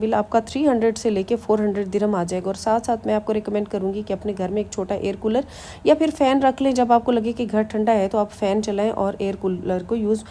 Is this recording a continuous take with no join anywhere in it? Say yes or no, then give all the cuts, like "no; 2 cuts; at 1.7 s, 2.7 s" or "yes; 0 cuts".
yes; 0 cuts